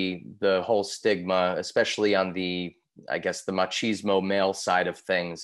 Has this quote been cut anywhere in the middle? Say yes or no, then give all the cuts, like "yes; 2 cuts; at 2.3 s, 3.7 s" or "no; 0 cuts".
no; 0 cuts